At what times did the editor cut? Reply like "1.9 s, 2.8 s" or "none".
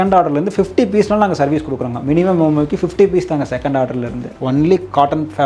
4.4 s